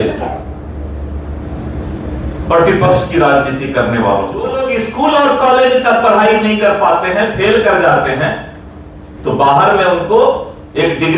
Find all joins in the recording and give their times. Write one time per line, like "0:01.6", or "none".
0:04.6